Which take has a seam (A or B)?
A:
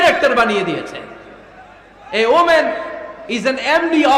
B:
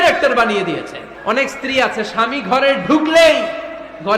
B